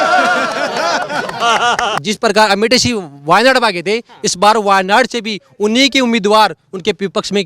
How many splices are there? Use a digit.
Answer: 1